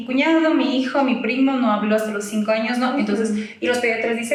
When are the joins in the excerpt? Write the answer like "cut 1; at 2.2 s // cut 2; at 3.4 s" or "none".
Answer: none